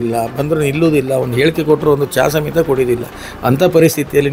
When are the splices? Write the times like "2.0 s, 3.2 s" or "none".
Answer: none